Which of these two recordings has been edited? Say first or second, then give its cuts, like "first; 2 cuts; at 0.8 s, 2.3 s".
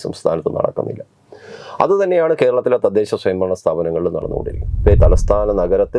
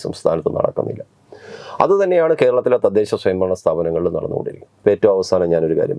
first; 1 cut; at 5.0 s